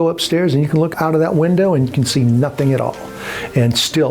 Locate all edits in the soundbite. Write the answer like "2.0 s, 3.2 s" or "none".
0.9 s